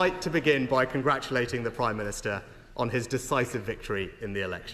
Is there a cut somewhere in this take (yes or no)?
no